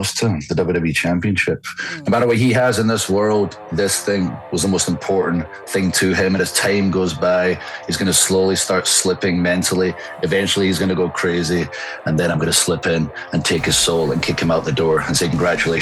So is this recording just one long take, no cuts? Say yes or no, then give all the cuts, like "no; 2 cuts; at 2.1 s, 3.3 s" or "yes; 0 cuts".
yes; 0 cuts